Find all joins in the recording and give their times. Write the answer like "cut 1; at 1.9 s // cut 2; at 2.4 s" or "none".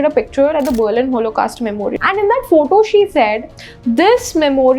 cut 1; at 1.9 s